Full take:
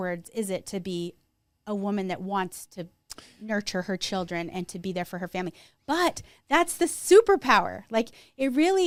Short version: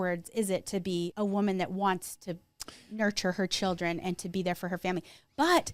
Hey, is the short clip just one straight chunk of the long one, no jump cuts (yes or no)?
no